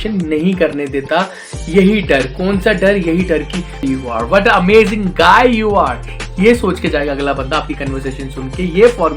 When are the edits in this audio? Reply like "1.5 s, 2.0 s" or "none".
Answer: 3.8 s